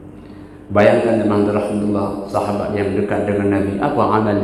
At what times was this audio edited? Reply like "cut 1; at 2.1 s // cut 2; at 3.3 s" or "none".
none